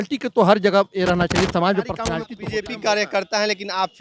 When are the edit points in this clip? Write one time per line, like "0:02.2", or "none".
0:02.3